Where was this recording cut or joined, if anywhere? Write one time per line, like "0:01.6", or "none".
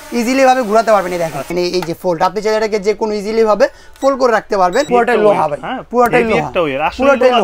0:01.5
0:04.9